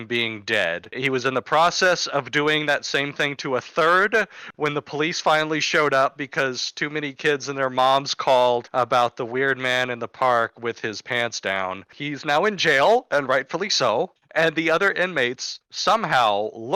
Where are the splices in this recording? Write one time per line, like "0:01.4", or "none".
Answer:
none